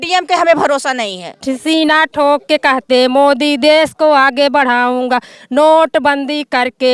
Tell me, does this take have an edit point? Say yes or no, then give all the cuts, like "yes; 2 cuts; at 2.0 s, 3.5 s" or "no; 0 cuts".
yes; 1 cut; at 1.3 s